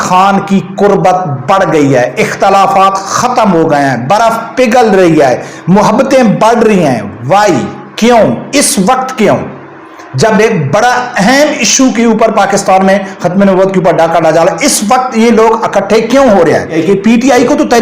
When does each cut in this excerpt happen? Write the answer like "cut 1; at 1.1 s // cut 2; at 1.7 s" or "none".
cut 1; at 16.7 s